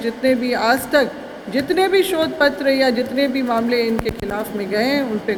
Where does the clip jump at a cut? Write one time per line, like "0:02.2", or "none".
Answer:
none